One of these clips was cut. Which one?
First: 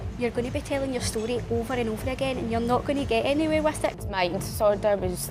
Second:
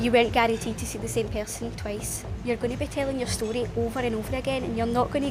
first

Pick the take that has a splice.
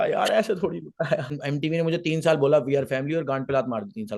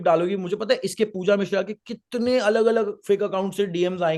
first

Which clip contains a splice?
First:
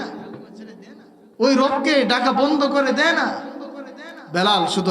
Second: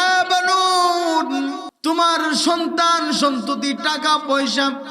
second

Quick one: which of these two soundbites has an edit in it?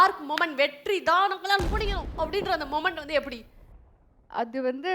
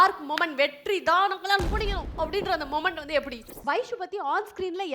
second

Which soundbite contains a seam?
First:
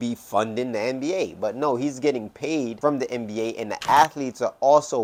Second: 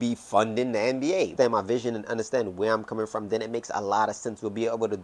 second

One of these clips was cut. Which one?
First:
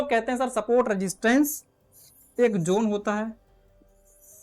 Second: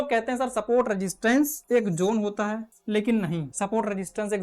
second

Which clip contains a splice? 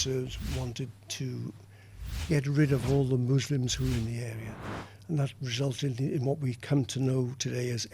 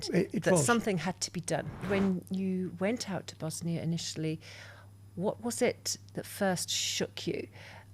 second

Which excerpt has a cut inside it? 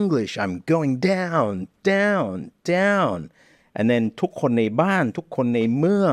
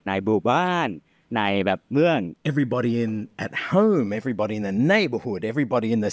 second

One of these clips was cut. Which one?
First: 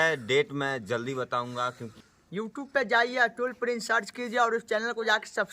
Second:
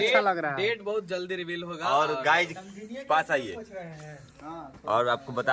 first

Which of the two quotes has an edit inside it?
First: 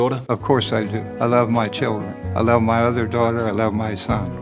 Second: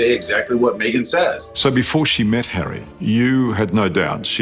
second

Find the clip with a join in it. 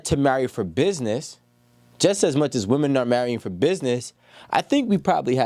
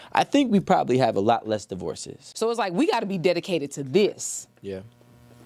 second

